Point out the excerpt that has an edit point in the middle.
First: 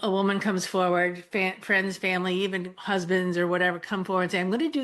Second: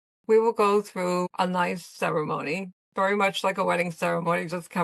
second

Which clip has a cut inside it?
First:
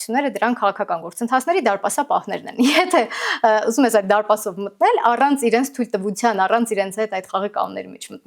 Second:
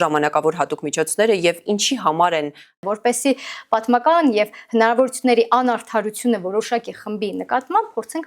second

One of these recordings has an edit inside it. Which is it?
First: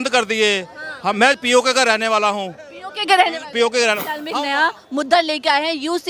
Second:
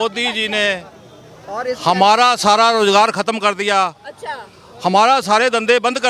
first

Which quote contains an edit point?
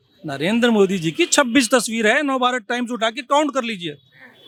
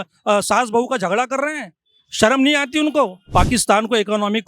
second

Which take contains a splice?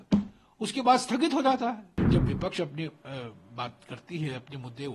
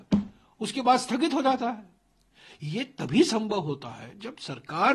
first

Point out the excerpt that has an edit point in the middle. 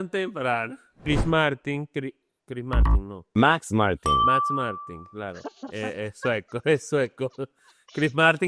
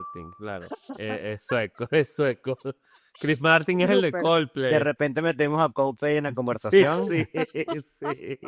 first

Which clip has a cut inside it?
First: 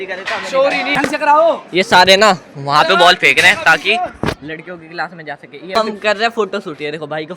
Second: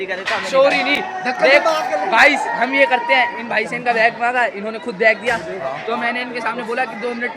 first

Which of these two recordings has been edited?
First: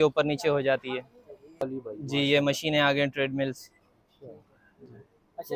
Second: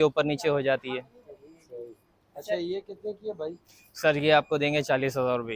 first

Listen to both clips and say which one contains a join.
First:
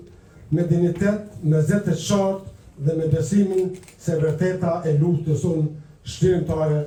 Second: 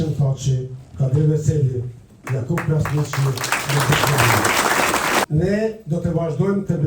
second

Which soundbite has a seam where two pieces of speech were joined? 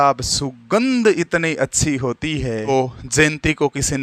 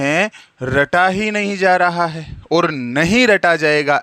first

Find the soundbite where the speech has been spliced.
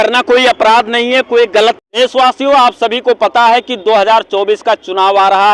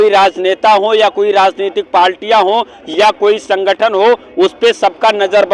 first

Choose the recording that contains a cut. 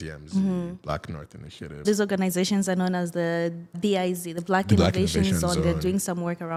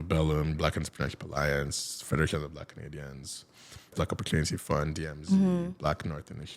second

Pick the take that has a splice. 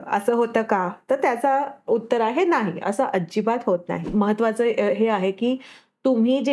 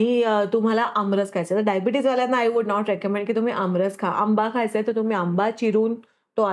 first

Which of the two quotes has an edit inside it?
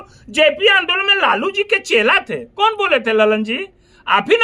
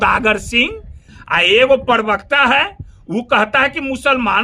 second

